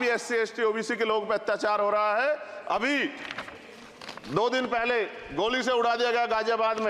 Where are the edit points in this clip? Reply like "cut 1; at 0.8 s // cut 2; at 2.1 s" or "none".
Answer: none